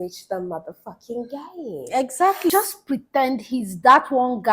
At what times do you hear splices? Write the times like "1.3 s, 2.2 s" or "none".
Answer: 2.5 s